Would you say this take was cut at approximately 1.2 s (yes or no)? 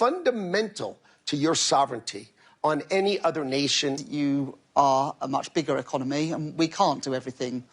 no